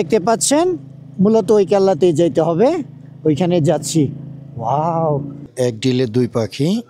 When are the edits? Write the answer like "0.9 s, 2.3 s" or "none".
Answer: 5.5 s